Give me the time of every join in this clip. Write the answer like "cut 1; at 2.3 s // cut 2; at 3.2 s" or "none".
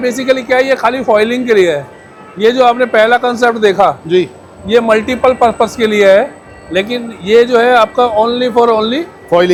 none